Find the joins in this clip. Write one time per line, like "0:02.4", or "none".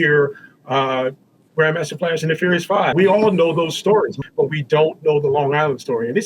0:02.9
0:04.1